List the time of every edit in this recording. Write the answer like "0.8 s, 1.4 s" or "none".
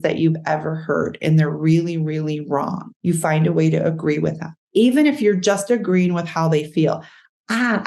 2.9 s, 4.5 s